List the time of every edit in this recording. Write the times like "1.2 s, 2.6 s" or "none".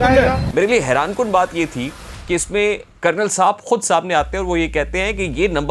none